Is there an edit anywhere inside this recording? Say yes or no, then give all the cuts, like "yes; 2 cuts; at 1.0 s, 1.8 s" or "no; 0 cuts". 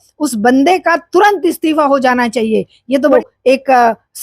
yes; 1 cut; at 3.1 s